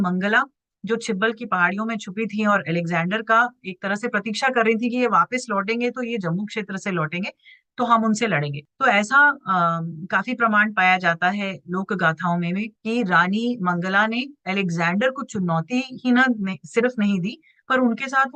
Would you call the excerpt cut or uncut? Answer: uncut